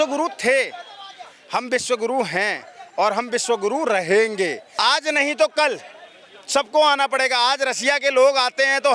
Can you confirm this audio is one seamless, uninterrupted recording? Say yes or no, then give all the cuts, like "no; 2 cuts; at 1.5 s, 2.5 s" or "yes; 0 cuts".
no; 1 cut; at 4.6 s